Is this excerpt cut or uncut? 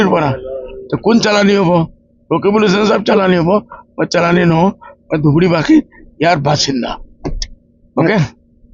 uncut